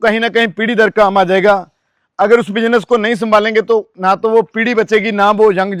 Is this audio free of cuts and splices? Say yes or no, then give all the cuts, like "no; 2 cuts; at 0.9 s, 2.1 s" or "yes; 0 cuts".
yes; 0 cuts